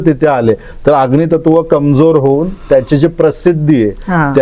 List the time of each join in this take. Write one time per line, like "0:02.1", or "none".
none